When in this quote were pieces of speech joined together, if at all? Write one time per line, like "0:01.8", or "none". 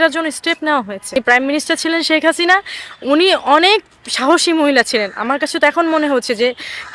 0:01.2